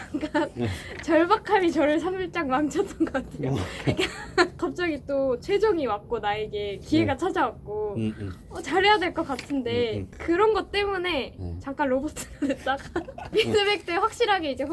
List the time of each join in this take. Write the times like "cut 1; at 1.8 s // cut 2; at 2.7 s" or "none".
cut 1; at 4.6 s // cut 2; at 10.1 s // cut 3; at 13.3 s

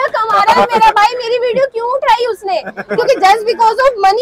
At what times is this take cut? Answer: none

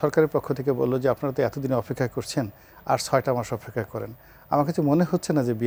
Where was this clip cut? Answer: none

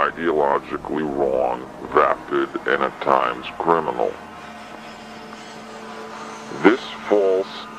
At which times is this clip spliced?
none

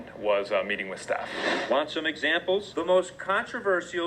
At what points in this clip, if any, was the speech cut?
cut 1; at 2.7 s

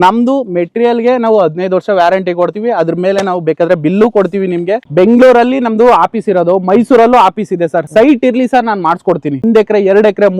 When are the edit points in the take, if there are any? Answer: cut 1; at 4.8 s // cut 2; at 7.8 s // cut 3; at 9.4 s

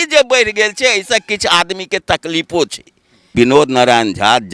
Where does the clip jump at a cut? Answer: cut 1; at 3.3 s

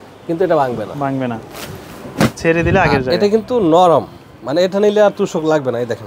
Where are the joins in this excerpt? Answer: none

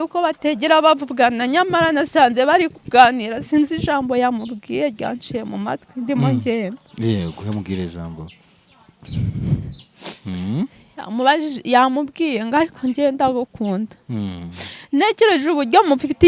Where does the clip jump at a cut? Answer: none

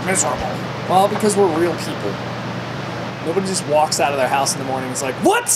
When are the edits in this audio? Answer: none

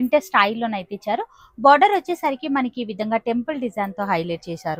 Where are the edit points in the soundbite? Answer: none

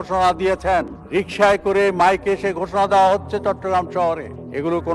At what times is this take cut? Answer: none

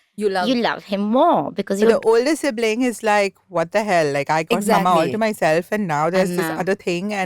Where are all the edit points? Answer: cut 1; at 1.9 s

